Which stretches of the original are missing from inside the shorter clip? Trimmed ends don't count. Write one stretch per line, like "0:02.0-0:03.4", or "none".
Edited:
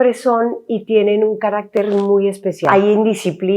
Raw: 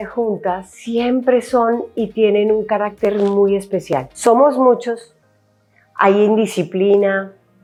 0:03.9-0:05.9

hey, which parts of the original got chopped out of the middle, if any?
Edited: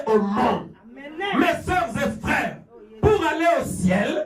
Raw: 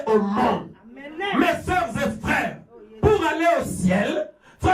none

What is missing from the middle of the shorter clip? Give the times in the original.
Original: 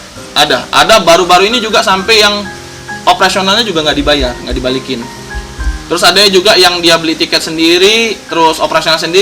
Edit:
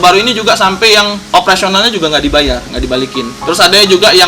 0:02.5-0:02.9
0:05.1-0:05.8

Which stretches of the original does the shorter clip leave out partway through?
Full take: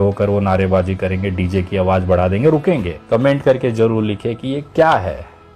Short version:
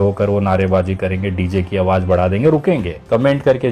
none

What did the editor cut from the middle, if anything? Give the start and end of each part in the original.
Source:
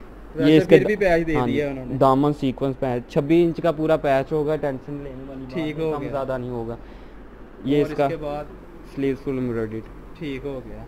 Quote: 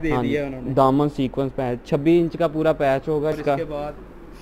0:04.6-0:07.9

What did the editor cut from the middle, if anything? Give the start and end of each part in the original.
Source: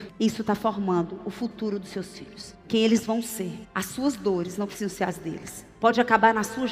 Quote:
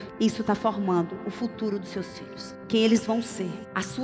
none

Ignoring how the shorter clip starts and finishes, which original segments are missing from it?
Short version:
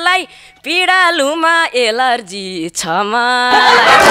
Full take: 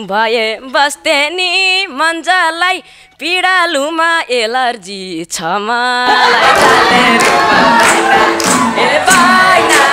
none

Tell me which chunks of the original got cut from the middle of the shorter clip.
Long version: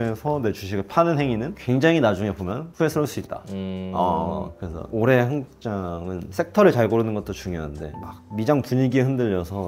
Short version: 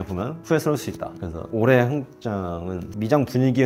0:03.5-0:04.6
0:06.2-0:08.1

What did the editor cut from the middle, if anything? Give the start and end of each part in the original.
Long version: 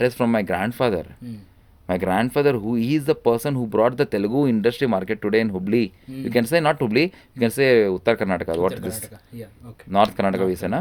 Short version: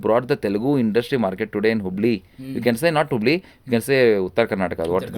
none

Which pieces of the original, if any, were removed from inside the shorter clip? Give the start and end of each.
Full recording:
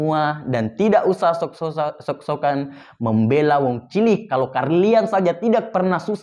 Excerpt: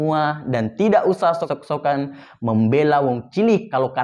0:01.5-0:02.1

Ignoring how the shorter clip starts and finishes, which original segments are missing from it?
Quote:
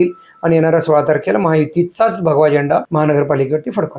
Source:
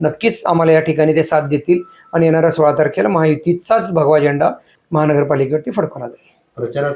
0:04.6-0:04.9

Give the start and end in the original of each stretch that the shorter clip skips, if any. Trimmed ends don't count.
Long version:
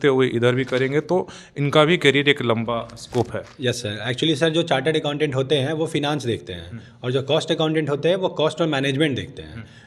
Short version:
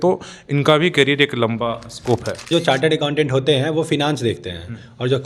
0:03.6-0:04.5

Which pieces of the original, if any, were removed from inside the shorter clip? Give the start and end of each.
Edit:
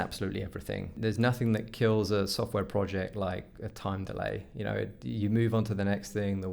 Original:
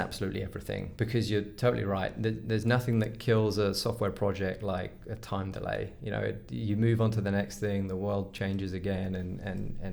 0:00.9-0:02.4

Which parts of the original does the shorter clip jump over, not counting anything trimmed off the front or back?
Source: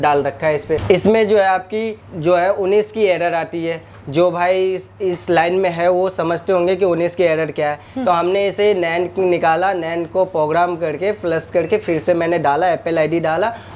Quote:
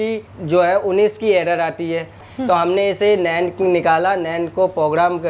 0:04.0-0:07.8

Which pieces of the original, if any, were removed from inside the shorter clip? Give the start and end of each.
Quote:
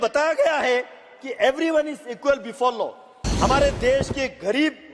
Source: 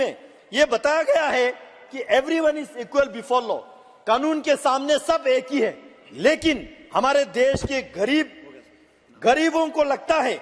0:03.9-0:06.7

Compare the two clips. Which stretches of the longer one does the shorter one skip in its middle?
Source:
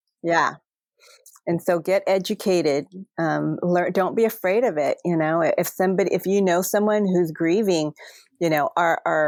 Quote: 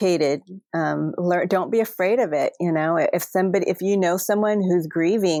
none

